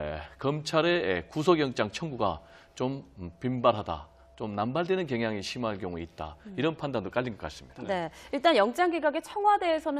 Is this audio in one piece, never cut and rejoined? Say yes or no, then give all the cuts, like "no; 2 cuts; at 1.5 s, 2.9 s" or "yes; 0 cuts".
yes; 0 cuts